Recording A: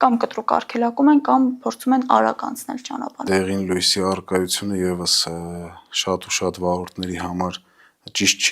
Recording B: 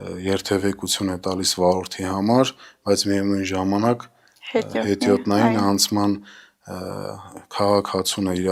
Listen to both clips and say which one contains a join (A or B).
A